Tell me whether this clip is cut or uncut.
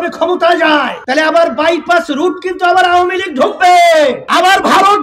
cut